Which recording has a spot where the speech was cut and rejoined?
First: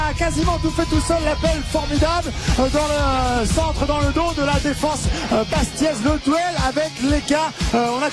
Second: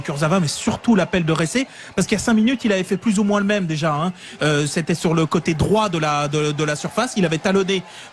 second; 1 cut; at 4.6 s

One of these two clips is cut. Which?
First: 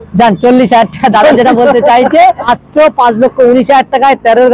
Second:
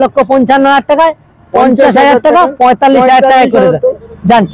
first; 1 cut; at 2.5 s

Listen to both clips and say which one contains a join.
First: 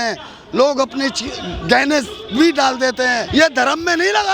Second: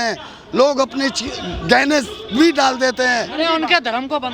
first; 1 cut; at 3.2 s

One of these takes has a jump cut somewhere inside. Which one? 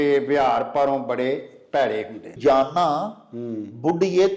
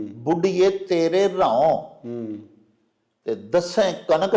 first; 1 cut; at 2.3 s

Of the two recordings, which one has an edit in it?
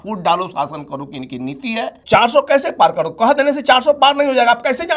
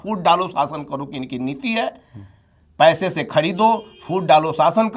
first; 1 cut; at 2.0 s

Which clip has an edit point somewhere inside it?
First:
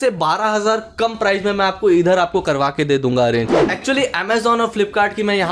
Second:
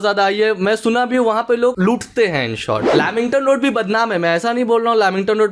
first; 1 cut; at 3.7 s

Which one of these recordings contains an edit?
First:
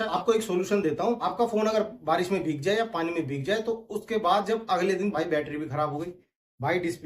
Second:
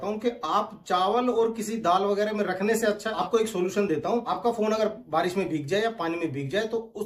first; 1 cut; at 5.1 s

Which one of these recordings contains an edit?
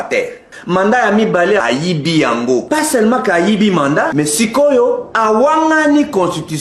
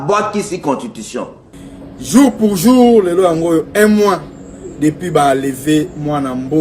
second; 1 cut; at 1.5 s

